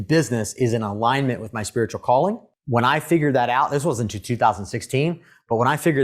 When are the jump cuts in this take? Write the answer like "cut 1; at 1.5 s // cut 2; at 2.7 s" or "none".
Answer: cut 1; at 2.5 s